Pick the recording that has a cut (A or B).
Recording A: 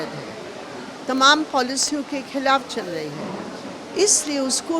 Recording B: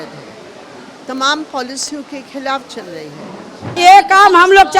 B